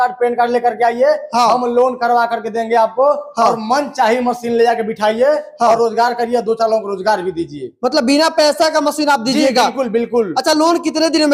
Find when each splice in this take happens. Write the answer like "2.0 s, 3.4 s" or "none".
none